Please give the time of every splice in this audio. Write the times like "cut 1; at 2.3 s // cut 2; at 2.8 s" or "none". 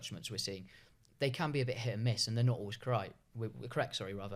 none